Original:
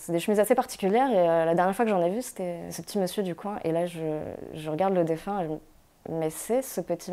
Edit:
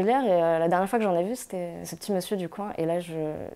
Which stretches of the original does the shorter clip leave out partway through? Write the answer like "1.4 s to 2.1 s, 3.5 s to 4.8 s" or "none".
none